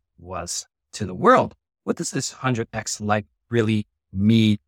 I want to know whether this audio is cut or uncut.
uncut